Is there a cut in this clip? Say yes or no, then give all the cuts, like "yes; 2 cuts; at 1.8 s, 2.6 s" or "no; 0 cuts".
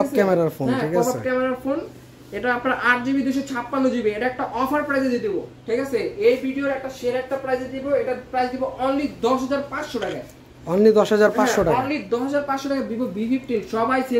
no; 0 cuts